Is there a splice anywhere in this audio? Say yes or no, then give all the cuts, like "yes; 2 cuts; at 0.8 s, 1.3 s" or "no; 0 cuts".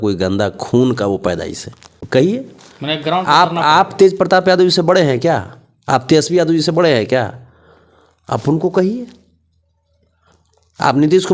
yes; 1 cut; at 2.0 s